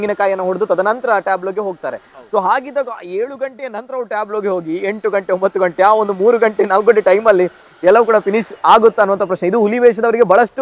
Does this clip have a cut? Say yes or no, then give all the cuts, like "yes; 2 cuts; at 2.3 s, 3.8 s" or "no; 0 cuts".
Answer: no; 0 cuts